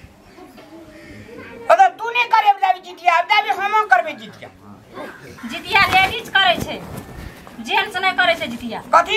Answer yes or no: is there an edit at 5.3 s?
yes